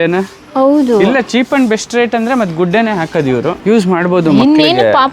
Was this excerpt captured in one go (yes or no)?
no